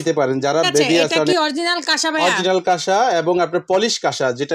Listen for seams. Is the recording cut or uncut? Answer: cut